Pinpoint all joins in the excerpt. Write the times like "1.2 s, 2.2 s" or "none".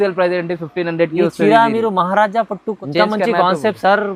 2.8 s